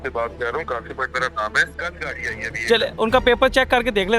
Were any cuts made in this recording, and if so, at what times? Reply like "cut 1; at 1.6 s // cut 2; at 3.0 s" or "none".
cut 1; at 1.8 s